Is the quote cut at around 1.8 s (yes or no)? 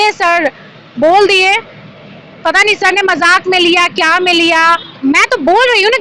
no